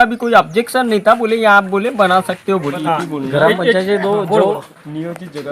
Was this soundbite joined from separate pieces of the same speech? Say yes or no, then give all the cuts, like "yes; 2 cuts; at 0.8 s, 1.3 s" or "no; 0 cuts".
yes; 1 cut; at 2.7 s